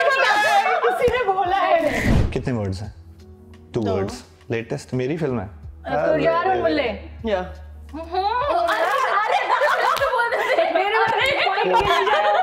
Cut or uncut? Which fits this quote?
cut